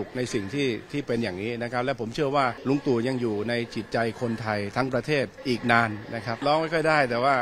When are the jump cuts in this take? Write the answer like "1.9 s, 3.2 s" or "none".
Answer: 2.6 s, 5.4 s, 6.4 s